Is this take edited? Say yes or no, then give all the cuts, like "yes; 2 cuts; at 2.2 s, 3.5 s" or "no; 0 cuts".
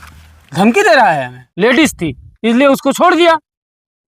yes; 1 cut; at 1.4 s